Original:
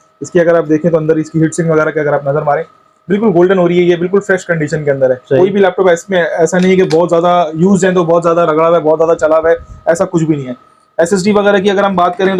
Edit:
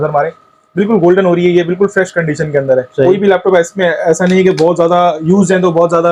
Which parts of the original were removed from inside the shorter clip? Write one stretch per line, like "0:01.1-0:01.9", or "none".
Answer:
none